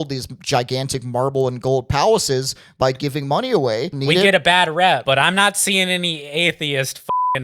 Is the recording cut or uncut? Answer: cut